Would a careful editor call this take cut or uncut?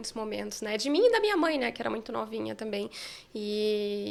uncut